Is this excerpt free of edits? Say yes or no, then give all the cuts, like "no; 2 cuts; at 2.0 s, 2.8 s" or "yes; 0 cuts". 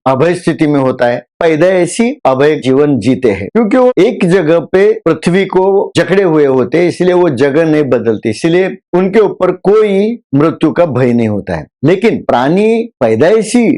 no; 2 cuts; at 1.3 s, 2.6 s